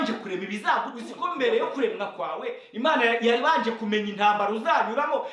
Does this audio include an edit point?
yes; 1 cut; at 1.4 s

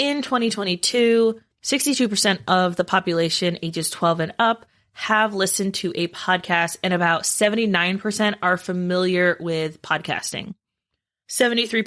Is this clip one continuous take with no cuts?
no; 1 cut; at 1.5 s

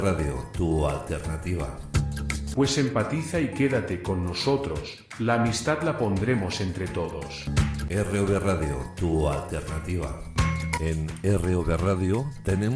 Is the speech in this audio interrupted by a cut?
no; 0 cuts

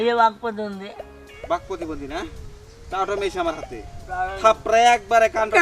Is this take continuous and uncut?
no; 1 cut; at 1.4 s

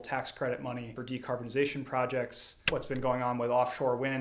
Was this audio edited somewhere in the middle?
yes; 2 cuts; at 1.0 s, 2.6 s

